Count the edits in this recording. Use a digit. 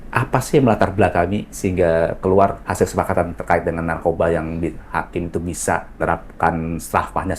3